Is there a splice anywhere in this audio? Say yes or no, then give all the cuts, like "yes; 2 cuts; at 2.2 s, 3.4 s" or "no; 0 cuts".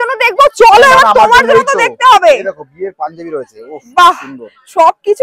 no; 0 cuts